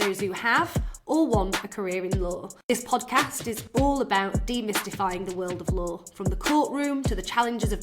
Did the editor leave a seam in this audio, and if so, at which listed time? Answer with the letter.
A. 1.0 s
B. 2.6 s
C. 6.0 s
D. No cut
B